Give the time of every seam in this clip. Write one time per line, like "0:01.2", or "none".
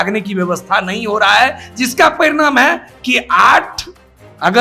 none